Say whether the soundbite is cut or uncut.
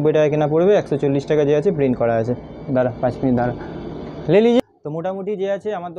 uncut